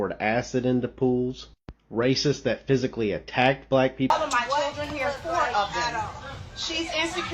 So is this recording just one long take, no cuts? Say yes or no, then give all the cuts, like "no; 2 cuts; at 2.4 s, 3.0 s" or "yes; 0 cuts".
no; 1 cut; at 4.1 s